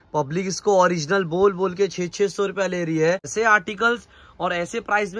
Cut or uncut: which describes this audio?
cut